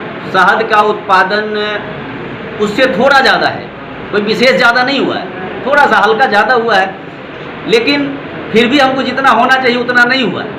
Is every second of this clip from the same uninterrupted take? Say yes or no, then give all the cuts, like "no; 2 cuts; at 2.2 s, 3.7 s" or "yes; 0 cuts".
yes; 0 cuts